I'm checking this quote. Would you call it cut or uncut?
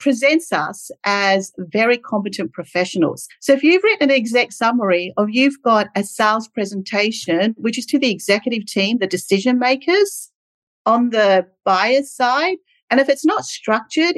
cut